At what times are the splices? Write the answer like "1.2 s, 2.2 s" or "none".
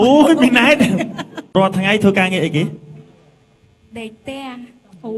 1.4 s